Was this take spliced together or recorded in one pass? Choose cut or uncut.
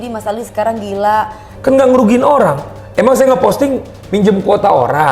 cut